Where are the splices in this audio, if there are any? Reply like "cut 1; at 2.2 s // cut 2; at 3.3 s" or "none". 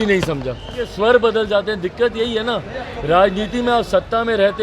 cut 1; at 0.9 s